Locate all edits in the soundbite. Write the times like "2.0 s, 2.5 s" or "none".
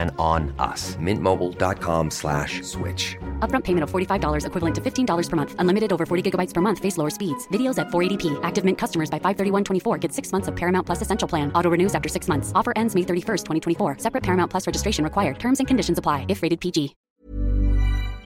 17.1 s